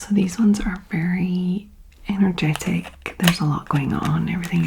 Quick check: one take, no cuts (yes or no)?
yes